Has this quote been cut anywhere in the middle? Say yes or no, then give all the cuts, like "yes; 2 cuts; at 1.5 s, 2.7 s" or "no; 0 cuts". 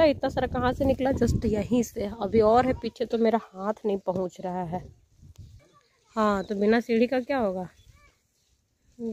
no; 0 cuts